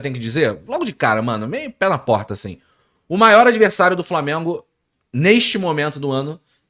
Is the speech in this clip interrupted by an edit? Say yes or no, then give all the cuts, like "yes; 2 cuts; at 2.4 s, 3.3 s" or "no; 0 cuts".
no; 0 cuts